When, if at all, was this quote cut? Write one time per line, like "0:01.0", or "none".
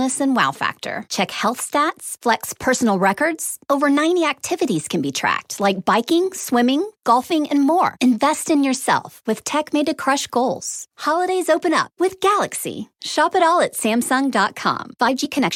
none